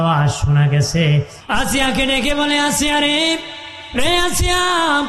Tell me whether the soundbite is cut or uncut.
cut